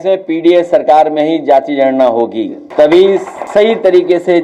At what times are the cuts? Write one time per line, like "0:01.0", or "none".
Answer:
0:02.6
0:03.4